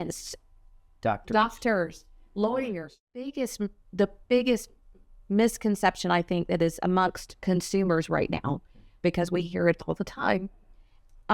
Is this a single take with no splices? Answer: no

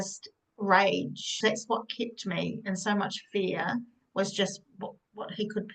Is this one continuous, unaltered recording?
no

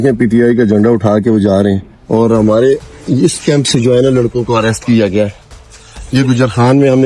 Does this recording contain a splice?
yes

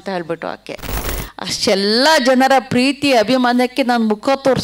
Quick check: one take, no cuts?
no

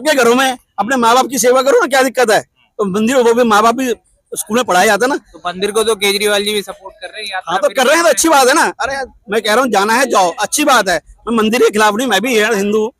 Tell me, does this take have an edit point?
no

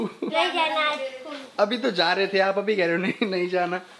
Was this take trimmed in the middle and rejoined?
no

